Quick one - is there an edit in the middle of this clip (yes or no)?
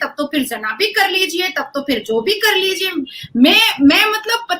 no